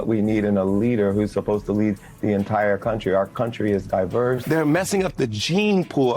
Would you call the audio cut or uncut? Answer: cut